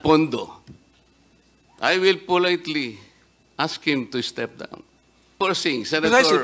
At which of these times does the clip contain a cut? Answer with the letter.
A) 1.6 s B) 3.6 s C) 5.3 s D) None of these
C